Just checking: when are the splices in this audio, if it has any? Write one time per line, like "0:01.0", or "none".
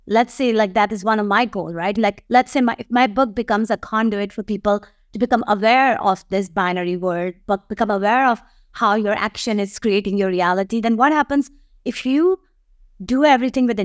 none